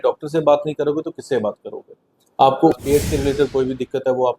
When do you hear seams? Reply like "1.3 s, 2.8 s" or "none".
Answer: 2.7 s